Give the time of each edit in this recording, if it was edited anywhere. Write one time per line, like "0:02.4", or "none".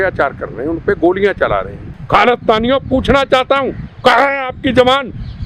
0:01.9